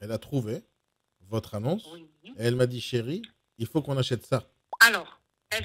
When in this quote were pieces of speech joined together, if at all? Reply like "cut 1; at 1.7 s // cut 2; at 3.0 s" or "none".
cut 1; at 4.6 s